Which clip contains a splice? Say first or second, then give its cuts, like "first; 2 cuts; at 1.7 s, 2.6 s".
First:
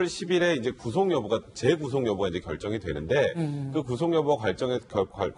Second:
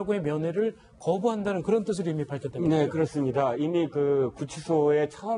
first; 1 cut; at 2.8 s